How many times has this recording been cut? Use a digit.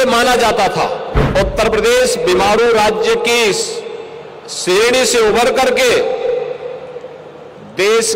1